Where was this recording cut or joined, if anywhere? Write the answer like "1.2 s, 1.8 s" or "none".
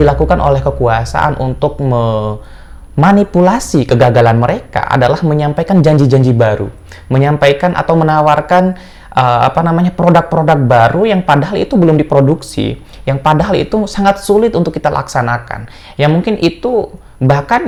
none

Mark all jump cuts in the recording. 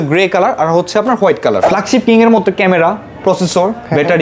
1.6 s

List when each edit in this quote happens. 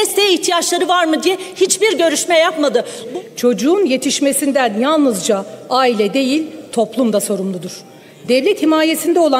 3.0 s

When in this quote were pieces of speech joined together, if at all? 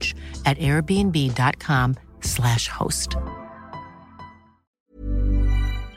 4.9 s

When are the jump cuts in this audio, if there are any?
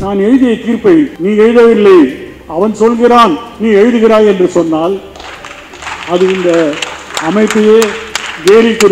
1.2 s

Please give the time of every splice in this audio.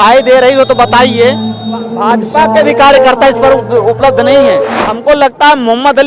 1.9 s, 4.8 s

